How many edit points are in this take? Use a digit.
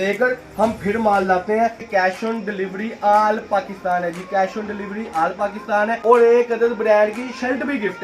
2